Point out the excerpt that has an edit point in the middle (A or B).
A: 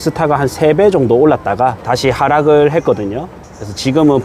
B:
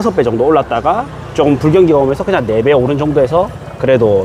A